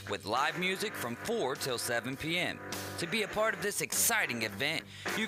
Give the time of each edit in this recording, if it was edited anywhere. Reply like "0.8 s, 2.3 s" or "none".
none